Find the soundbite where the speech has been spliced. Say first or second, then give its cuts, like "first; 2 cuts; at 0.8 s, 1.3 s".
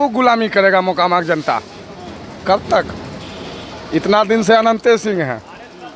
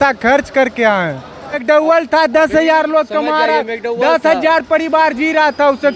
second; 1 cut; at 1.6 s